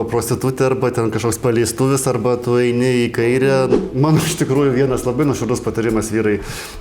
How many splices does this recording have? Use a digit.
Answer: 1